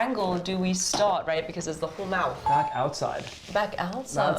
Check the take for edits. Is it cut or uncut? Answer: cut